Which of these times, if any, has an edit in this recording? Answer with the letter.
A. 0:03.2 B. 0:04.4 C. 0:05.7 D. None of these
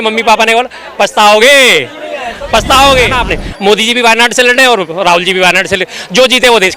A